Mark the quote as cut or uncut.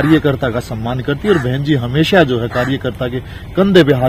uncut